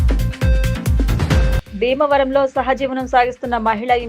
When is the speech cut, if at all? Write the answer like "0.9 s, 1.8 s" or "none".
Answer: 1.2 s